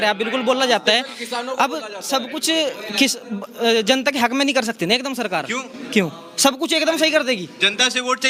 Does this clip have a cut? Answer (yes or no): no